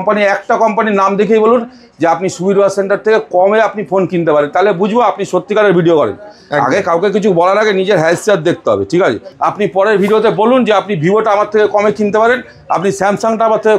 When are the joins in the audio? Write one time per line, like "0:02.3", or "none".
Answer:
0:09.3